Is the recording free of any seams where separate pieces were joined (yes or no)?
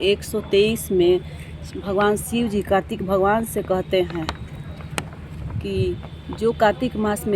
no